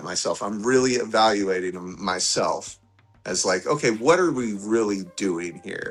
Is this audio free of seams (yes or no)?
yes